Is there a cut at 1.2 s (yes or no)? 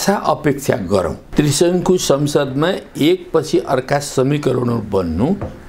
yes